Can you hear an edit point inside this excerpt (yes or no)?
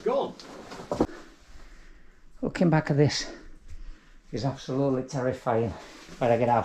yes